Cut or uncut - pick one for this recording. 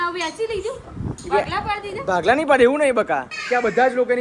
cut